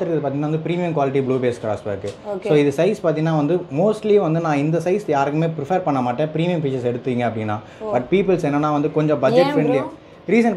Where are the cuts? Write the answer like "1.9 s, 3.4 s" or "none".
none